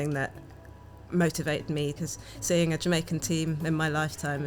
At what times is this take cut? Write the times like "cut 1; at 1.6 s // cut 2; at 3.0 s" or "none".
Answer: cut 1; at 2.0 s